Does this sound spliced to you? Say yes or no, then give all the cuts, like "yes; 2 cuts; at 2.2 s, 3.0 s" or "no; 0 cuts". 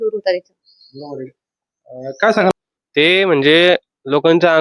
yes; 1 cut; at 2.5 s